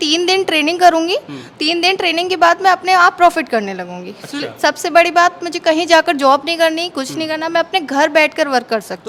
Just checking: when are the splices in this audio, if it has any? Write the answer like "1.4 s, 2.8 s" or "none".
none